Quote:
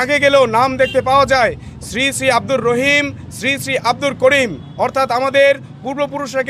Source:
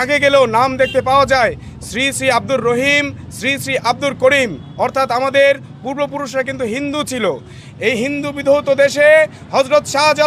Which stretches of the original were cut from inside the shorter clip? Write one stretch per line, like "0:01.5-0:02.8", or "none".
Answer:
none